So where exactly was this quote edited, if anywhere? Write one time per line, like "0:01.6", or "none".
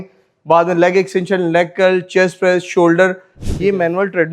0:03.3